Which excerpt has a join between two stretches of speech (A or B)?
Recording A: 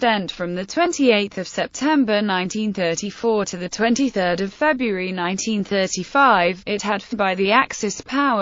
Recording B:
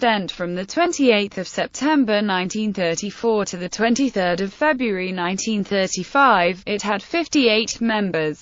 B